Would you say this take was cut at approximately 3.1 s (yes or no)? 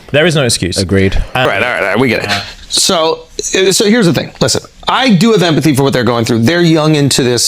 no